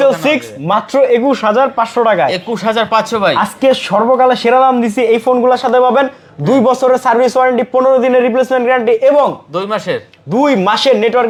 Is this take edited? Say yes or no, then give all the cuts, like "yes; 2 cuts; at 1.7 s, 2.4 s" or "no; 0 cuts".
no; 0 cuts